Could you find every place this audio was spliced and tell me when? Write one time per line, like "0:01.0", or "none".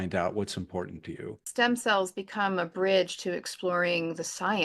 0:01.3